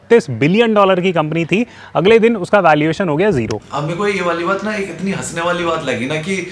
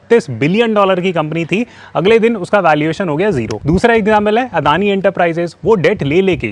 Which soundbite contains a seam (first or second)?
second